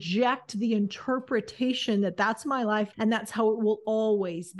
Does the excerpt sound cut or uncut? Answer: cut